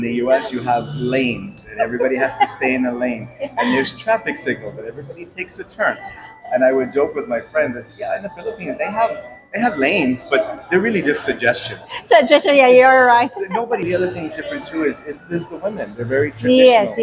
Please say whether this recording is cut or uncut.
cut